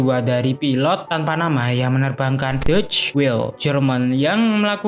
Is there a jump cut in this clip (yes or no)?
yes